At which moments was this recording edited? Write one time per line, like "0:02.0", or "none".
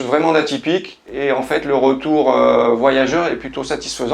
0:01.0